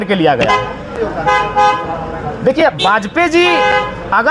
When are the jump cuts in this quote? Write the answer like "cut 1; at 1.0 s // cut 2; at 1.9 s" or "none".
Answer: cut 1; at 0.9 s